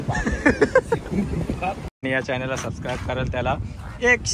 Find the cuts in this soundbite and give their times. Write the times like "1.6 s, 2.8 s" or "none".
2.0 s